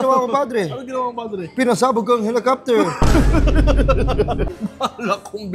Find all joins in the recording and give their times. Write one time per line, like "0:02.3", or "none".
0:04.5